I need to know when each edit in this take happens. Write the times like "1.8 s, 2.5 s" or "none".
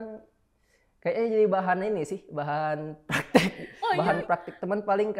3.9 s